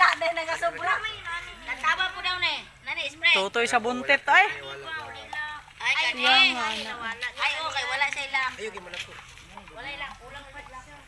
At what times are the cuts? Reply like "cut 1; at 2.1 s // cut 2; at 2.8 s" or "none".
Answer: none

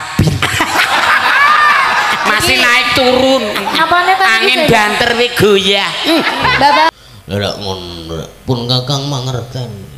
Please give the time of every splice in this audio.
cut 1; at 6.8 s

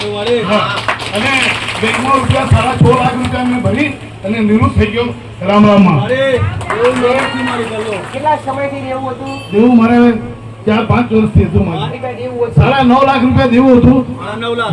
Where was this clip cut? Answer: cut 1; at 11.9 s

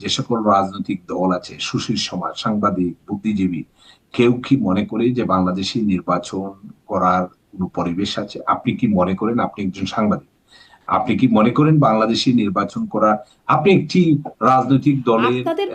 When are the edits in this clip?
none

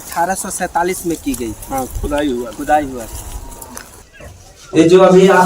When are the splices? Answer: cut 1; at 4.1 s

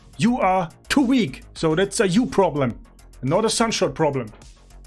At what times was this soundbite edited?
none

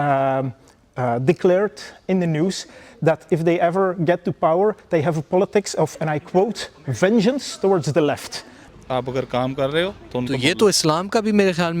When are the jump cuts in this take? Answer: cut 1; at 8.7 s

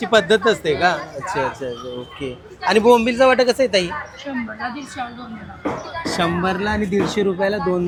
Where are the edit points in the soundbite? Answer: none

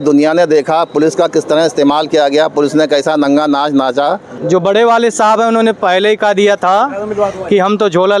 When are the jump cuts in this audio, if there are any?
cut 1; at 4.3 s

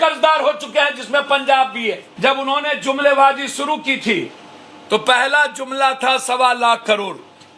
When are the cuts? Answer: cut 1; at 1.6 s

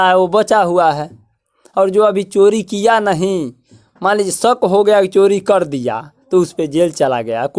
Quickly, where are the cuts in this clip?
none

